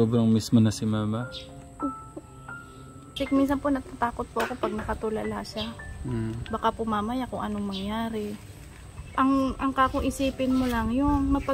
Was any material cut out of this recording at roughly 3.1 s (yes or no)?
yes